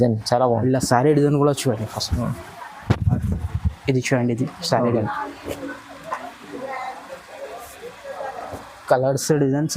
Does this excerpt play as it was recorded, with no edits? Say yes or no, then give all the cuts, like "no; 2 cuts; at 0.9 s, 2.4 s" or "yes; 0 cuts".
no; 1 cut; at 5.0 s